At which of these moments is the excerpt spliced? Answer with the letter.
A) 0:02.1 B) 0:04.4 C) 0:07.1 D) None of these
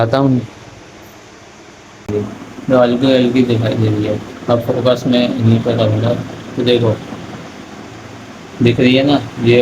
A